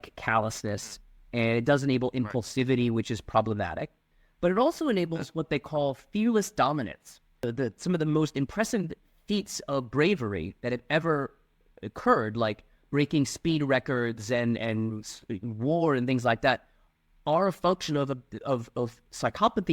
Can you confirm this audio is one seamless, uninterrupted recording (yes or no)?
no